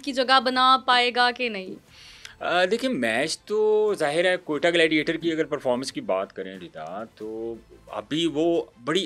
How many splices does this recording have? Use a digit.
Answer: 0